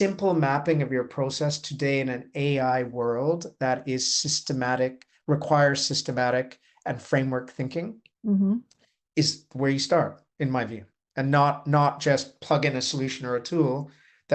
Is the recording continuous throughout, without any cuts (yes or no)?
yes